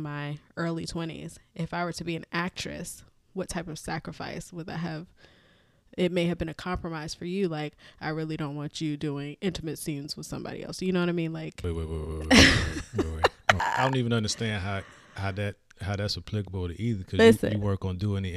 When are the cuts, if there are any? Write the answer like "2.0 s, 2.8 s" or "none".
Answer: 11.5 s, 13.6 s